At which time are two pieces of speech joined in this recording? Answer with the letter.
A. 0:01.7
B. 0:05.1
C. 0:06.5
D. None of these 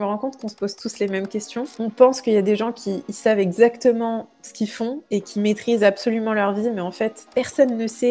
A